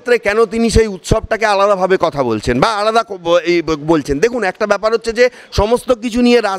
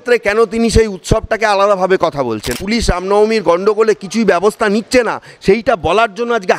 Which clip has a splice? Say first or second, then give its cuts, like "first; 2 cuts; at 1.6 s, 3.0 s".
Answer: second; 1 cut; at 2.5 s